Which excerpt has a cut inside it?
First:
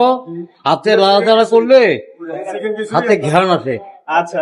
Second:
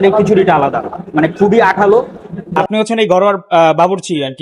second; 1 cut; at 2.6 s

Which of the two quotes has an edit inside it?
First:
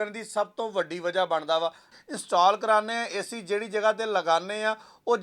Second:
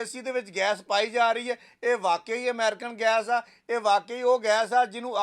first; 1 cut; at 1.9 s

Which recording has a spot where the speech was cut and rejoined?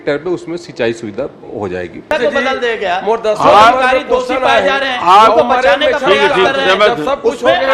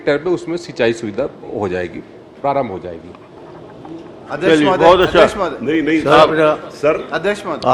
first; 1 cut; at 2.1 s

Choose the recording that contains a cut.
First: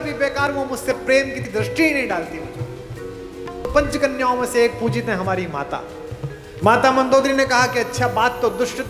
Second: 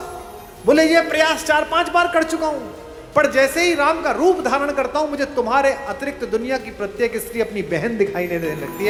first; 1 cut; at 3.6 s

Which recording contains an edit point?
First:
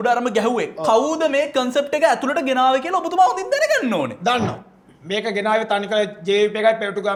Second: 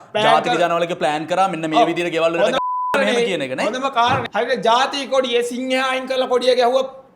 second; 1 cut; at 4.3 s

